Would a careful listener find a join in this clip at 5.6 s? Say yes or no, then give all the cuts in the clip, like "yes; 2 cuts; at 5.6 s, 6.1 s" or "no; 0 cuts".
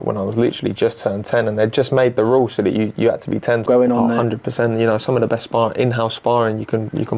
no; 1 cut; at 3.7 s